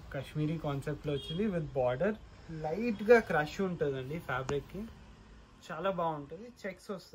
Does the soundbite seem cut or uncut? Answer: uncut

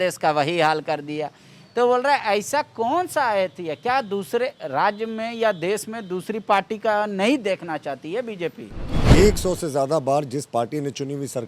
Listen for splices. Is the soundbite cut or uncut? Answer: cut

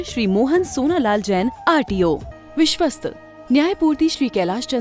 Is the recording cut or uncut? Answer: cut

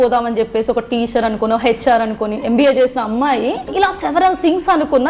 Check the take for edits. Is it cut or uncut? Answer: cut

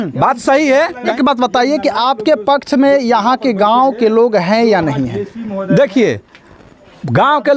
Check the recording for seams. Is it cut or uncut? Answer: cut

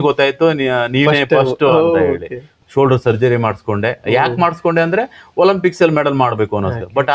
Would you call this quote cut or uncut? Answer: cut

